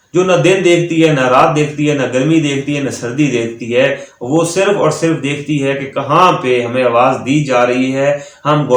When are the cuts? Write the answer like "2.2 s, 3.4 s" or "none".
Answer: none